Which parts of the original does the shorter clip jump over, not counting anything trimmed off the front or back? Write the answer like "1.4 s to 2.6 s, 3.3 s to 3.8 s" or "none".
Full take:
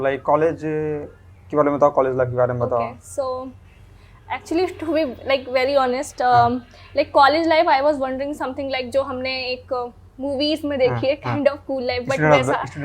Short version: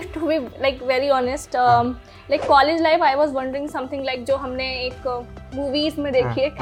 none

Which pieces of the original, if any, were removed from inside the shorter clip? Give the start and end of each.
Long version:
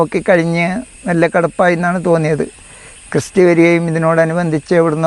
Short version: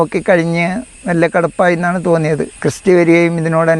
2.5 s to 3.0 s

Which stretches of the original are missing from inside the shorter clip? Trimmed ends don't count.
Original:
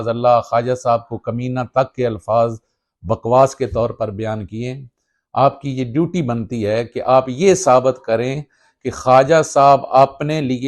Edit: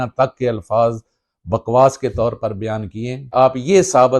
4.8 s to 7.0 s

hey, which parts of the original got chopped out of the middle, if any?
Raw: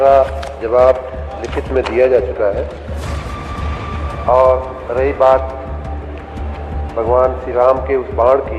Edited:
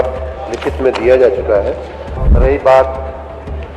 3.1 s to 4.8 s

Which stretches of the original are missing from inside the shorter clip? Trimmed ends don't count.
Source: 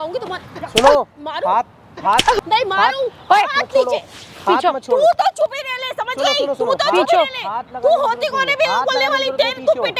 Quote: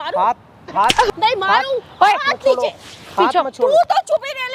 none

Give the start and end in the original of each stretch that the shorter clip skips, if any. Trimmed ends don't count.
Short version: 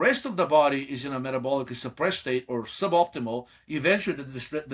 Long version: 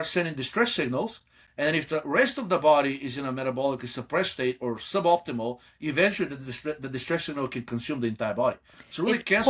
none

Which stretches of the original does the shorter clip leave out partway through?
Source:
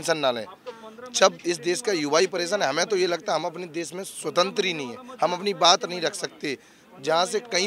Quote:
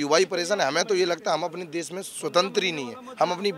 none

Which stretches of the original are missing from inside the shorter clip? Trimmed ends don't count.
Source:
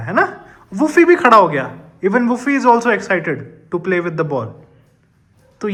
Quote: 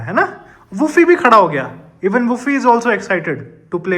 none

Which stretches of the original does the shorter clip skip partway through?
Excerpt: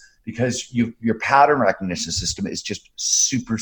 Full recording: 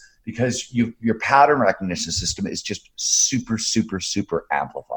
none

